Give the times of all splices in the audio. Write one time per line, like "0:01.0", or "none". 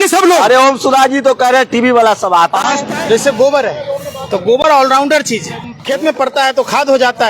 0:02.9
0:05.7